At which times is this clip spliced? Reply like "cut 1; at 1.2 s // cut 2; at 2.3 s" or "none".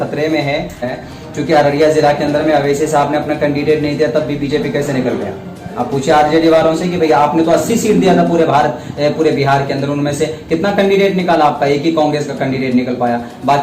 cut 1; at 1.0 s